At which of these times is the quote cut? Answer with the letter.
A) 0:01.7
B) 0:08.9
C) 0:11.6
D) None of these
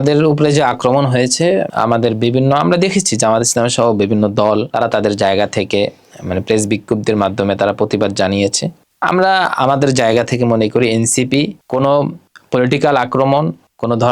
A